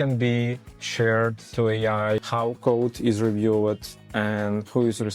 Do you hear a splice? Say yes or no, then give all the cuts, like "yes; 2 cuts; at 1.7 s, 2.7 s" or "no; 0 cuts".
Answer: no; 0 cuts